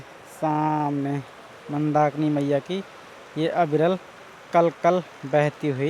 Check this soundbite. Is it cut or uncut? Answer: uncut